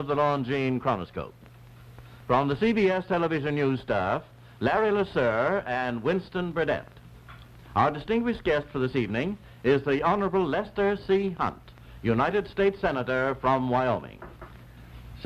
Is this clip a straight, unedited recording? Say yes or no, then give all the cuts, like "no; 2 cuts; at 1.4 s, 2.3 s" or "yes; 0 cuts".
no; 1 cut; at 13.0 s